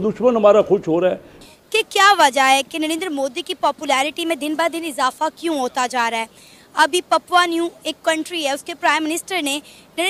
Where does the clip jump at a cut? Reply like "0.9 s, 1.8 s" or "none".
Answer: 1.3 s